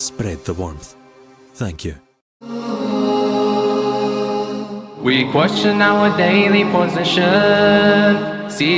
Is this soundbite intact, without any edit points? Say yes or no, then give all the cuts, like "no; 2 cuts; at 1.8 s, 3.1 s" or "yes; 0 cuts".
no; 1 cut; at 2.6 s